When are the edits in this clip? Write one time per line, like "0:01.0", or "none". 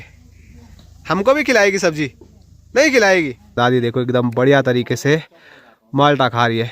0:03.5